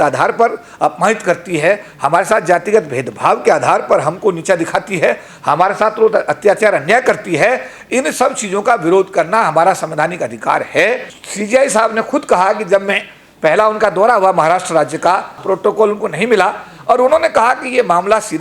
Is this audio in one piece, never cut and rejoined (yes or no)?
no